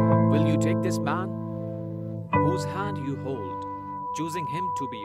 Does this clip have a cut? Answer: no; 0 cuts

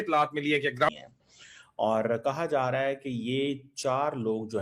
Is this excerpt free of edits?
no; 1 cut; at 0.9 s

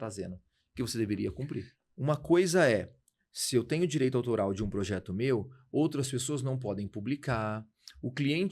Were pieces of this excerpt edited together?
yes; 1 cut; at 1.7 s

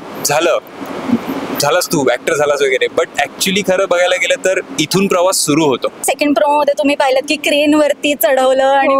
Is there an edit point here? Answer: yes; 1 cut; at 6.1 s

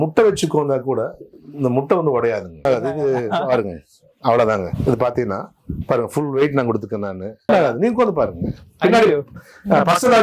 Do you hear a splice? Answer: yes; 2 cuts; at 2.6 s, 7.5 s

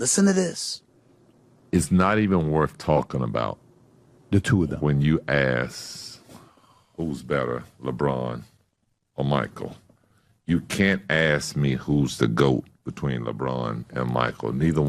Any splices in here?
no; 0 cuts

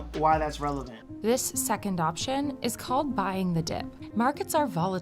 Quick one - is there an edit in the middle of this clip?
yes; 2 cuts; at 1.0 s, 4.0 s

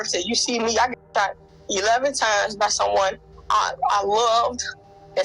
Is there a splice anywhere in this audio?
no; 0 cuts

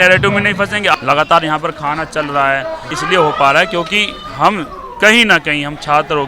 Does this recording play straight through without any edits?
no; 2 cuts; at 0.9 s, 2.9 s

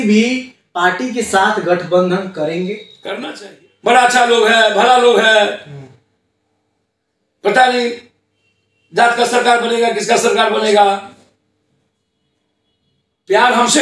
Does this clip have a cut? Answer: yes; 1 cut; at 3.3 s

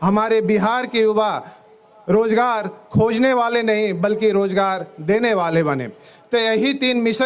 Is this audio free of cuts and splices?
yes; 0 cuts

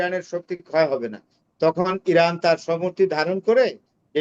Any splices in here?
no; 0 cuts

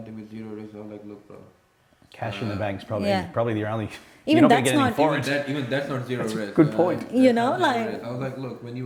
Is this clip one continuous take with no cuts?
yes; 0 cuts

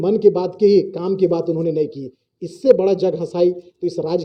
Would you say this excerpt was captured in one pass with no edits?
yes; 0 cuts

